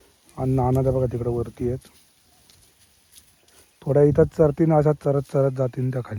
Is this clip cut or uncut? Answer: uncut